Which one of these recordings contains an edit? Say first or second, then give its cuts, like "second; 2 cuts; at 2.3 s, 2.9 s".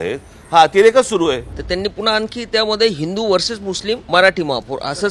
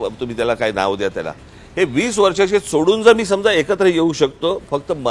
first; 2 cuts; at 1.5 s, 4.0 s